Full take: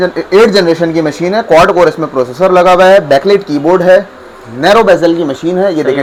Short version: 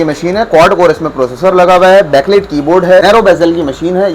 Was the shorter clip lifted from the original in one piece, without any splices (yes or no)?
no